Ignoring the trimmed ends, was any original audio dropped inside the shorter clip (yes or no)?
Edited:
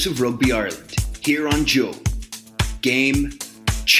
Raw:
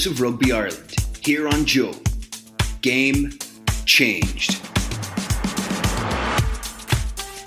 no